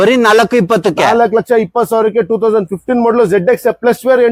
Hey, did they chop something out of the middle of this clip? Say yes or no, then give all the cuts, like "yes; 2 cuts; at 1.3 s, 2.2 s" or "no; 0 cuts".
no; 0 cuts